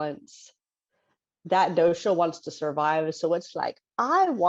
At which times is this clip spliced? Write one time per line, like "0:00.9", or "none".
none